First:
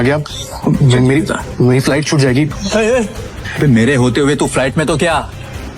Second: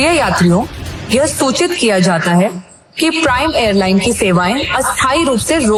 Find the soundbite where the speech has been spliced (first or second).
first